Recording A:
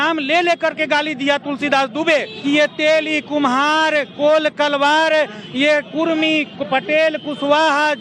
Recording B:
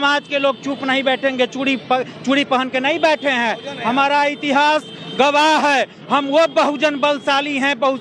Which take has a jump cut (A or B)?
A